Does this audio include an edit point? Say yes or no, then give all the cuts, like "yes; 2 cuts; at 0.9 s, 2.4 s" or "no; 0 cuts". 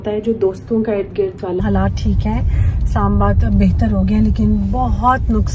yes; 1 cut; at 1.6 s